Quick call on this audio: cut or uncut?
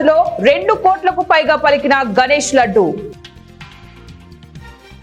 uncut